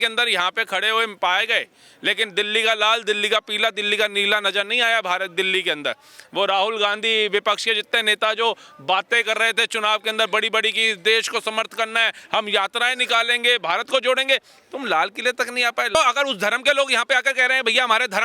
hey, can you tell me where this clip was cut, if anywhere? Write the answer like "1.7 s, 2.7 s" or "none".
15.9 s